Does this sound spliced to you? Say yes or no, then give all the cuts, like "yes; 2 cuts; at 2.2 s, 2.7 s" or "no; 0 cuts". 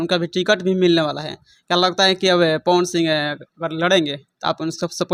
no; 0 cuts